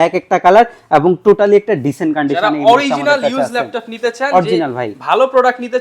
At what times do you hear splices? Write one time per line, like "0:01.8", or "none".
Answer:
none